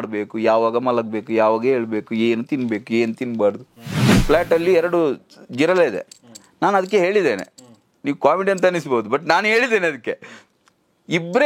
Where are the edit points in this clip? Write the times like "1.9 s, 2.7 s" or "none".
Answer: 4.1 s